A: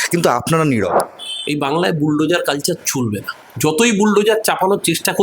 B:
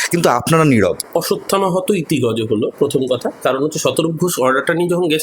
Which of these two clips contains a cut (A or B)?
A